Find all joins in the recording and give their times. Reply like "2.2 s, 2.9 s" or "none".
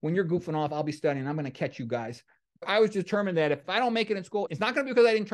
2.7 s, 3.6 s, 4.5 s